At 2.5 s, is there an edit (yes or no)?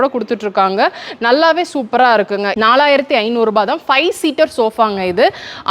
yes